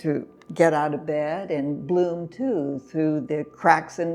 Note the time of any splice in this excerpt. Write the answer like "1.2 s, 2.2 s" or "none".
none